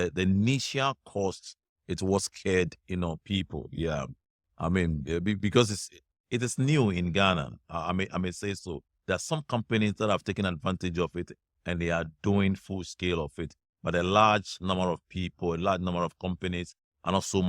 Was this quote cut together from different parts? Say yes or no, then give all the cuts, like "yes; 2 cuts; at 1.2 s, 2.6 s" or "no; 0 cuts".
no; 0 cuts